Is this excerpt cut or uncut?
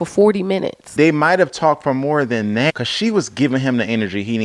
cut